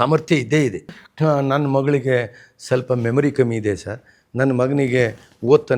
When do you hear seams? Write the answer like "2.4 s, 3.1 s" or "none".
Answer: 1.0 s